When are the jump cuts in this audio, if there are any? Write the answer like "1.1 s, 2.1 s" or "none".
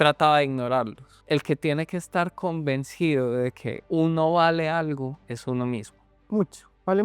1.1 s, 3.7 s, 5.3 s